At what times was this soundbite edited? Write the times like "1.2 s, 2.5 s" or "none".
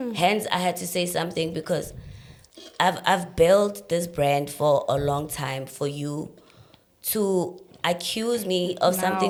none